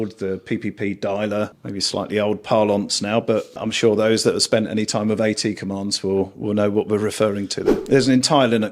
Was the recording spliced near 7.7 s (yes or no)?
yes